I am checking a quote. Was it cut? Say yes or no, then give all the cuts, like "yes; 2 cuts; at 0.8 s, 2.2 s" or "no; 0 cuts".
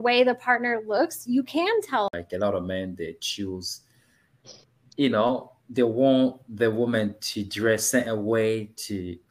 yes; 1 cut; at 2.1 s